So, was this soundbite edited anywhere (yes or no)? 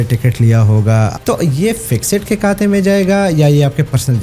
yes